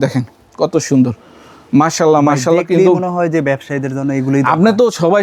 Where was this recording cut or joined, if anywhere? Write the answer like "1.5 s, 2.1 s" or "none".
none

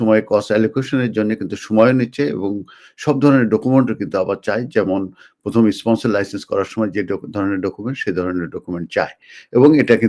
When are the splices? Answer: none

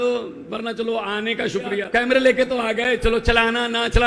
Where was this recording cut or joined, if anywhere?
1.8 s

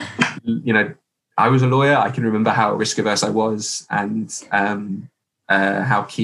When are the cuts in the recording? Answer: none

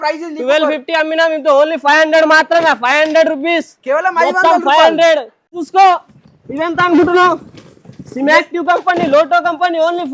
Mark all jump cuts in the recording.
5.6 s

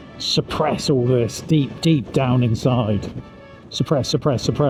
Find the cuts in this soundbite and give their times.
none

